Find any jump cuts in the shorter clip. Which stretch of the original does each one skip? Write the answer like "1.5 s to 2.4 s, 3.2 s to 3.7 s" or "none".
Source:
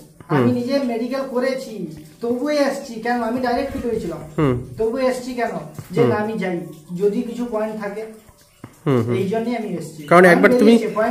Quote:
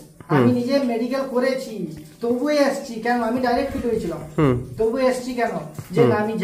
none